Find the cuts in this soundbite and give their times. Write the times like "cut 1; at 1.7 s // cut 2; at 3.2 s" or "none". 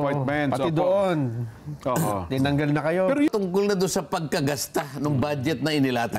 cut 1; at 3.3 s